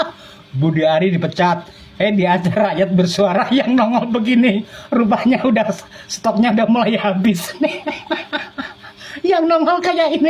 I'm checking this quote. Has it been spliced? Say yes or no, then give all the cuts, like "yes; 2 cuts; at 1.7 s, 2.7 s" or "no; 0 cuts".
no; 0 cuts